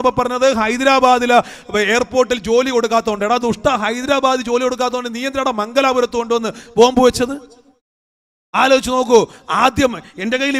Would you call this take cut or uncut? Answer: uncut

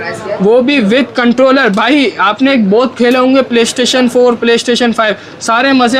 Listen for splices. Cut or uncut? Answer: uncut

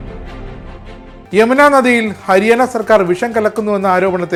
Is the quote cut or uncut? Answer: uncut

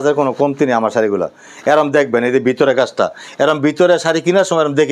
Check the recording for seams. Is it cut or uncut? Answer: uncut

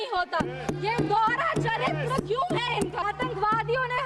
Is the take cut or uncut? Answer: cut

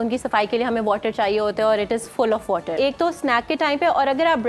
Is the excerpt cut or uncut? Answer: cut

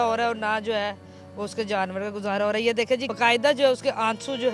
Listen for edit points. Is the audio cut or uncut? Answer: cut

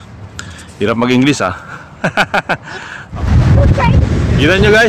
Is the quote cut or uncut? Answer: cut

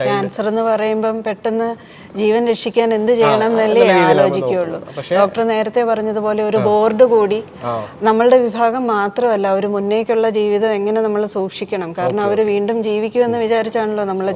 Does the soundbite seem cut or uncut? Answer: uncut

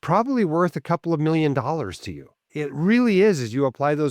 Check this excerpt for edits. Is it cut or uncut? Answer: cut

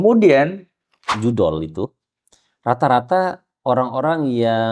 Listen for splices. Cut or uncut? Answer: cut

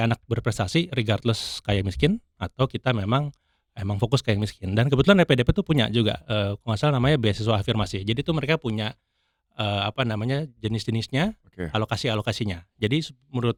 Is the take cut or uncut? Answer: uncut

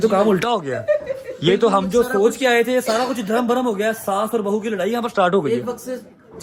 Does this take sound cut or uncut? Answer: uncut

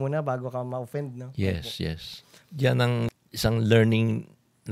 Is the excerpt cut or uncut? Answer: cut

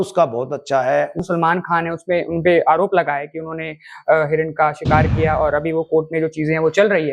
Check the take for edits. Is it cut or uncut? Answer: cut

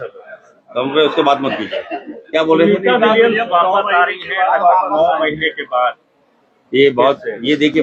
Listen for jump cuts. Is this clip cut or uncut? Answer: uncut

